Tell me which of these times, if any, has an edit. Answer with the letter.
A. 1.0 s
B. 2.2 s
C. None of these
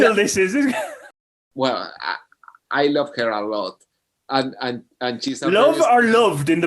A